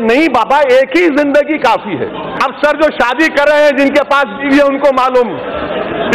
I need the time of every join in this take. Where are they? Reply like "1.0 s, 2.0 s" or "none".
2.4 s